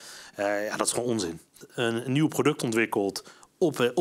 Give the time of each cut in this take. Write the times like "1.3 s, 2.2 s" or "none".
1.6 s